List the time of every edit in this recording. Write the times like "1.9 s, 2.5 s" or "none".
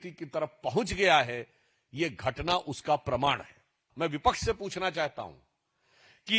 3.8 s